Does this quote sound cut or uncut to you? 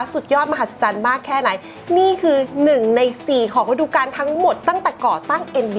uncut